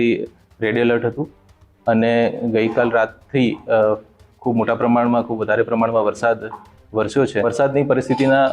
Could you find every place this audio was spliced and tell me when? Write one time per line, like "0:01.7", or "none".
0:07.4